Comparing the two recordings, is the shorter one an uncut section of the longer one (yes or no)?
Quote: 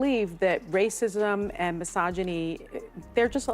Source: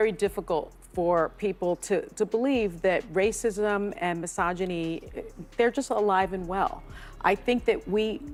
yes